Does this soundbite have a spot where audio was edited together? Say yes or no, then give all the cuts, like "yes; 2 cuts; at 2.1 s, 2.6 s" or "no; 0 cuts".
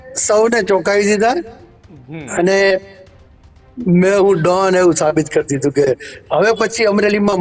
no; 0 cuts